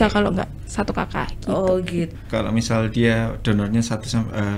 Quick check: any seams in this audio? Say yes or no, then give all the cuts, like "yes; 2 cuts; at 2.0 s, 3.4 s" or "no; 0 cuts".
yes; 1 cut; at 2.1 s